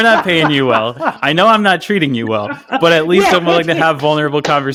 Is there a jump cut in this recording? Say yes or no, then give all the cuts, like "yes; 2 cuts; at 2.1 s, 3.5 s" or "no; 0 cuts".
no; 0 cuts